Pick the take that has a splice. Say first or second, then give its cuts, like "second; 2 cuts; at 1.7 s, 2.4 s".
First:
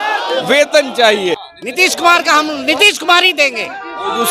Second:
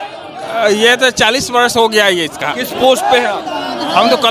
first; 1 cut; at 1.5 s